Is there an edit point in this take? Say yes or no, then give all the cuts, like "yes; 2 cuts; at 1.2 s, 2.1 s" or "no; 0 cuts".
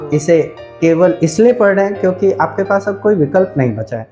no; 0 cuts